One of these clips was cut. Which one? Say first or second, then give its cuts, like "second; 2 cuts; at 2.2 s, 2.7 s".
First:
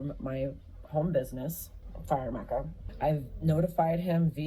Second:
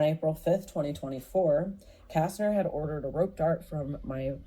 first; 1 cut; at 2.8 s